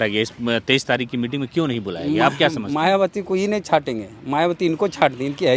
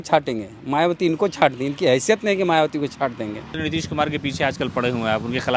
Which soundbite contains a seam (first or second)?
second